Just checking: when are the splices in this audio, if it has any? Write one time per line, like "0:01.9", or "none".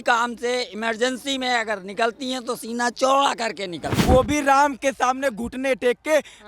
0:03.9